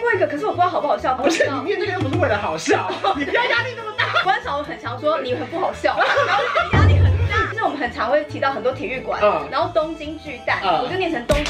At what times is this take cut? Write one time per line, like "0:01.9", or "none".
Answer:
0:01.2
0:04.2
0:07.5